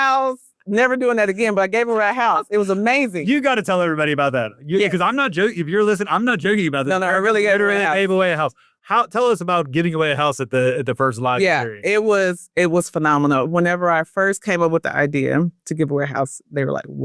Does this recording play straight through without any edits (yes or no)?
yes